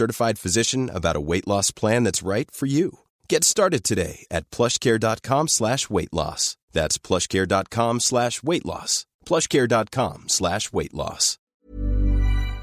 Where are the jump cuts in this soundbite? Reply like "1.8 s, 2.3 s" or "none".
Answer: 11.3 s